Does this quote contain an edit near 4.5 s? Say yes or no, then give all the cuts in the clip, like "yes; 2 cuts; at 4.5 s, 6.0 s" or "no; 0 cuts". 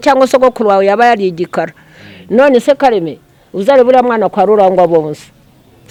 no; 0 cuts